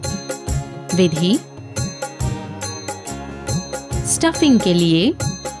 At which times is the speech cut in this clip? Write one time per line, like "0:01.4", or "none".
0:00.9
0:01.4
0:04.2